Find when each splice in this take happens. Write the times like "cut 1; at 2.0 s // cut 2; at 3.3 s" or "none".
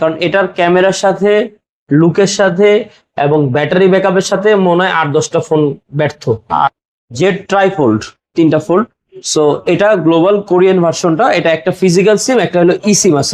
cut 1; at 6.6 s